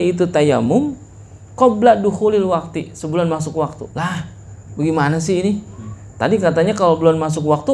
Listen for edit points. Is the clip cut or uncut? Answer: uncut